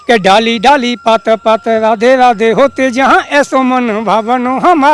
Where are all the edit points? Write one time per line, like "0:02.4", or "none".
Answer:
none